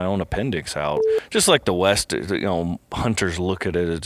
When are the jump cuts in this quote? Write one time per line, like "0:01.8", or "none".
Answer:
0:01.1